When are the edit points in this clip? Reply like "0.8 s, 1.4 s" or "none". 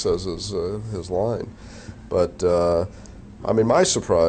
1.5 s